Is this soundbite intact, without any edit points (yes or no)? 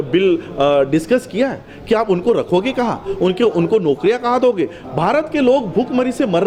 yes